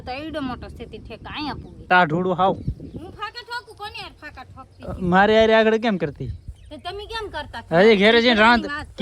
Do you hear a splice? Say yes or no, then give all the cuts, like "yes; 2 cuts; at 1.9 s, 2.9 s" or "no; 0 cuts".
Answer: yes; 1 cut; at 1.9 s